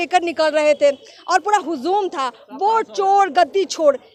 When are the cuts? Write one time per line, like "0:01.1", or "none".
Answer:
none

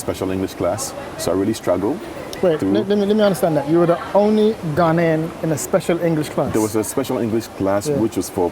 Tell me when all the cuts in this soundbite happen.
none

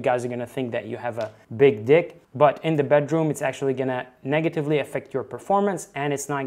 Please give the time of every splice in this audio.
0:01.4

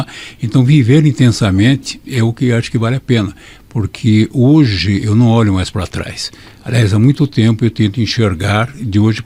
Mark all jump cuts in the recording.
none

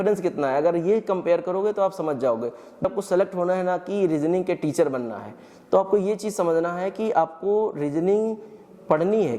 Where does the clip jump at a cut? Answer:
0:02.8

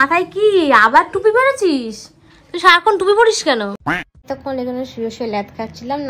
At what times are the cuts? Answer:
0:03.8

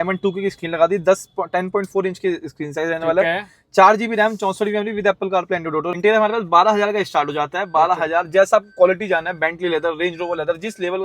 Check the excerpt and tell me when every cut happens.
0:05.9

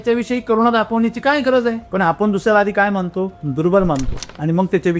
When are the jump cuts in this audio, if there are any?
0:01.8
0:03.4

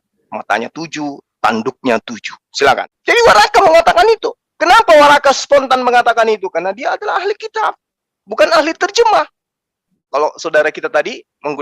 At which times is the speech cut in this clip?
0:02.9
0:10.0

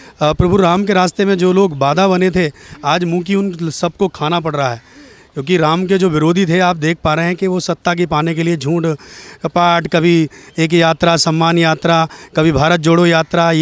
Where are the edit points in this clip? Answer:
none

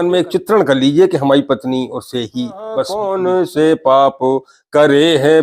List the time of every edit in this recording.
0:03.0

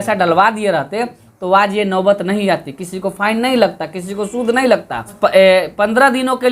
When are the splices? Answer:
0:05.1

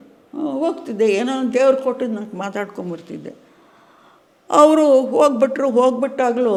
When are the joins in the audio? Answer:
none

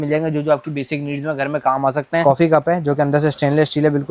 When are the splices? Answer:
0:02.2

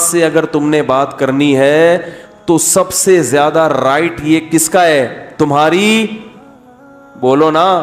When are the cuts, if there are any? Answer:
none

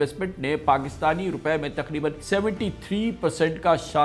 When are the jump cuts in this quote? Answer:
0:02.2

